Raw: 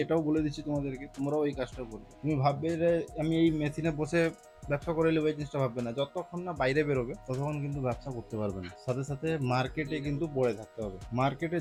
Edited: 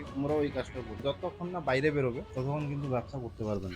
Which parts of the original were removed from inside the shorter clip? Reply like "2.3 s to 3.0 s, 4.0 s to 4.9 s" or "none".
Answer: 2.0 s to 5.9 s

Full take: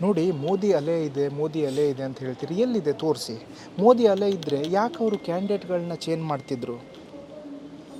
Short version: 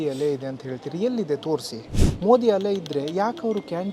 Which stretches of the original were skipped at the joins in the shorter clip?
none

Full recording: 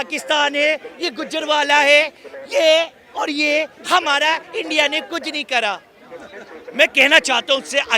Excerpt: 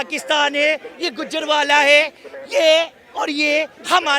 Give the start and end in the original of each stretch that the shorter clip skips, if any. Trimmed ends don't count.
none

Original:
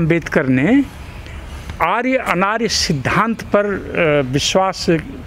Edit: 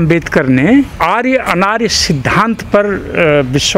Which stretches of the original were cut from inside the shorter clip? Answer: 0.9 s to 1.7 s

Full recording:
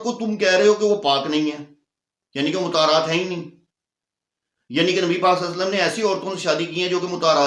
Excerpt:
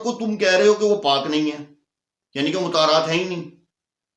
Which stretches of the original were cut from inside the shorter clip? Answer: none

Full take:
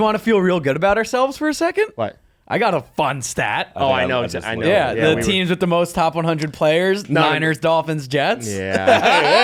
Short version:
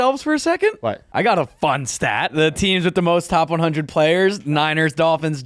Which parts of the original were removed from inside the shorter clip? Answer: 2.2 s to 2.4 s, 3.7 s to 5.0 s

